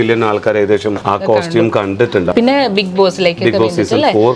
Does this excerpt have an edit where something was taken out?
yes; 1 cut; at 2.3 s

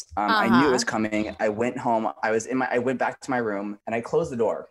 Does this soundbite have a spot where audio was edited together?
no; 0 cuts

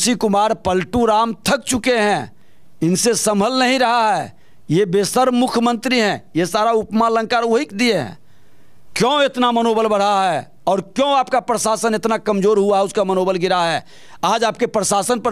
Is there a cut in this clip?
no; 0 cuts

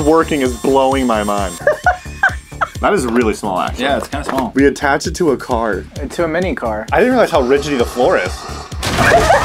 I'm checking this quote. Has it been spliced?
yes; 4 cuts; at 1.5 s, 2.7 s, 4.5 s, 6.8 s

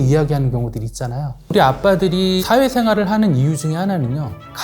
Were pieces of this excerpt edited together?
yes; 1 cut; at 1.5 s

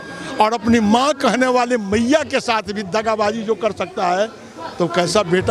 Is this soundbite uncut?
yes; 0 cuts

